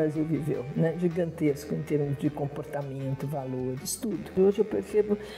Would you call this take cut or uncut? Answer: cut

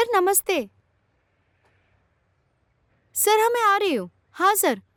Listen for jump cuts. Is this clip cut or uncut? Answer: uncut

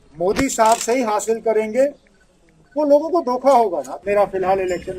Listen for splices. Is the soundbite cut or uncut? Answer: cut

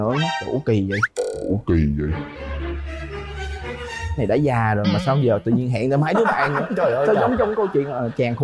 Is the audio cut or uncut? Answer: uncut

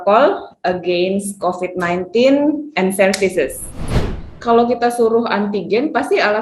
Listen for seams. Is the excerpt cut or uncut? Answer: cut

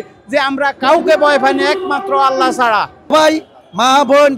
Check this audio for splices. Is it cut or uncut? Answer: cut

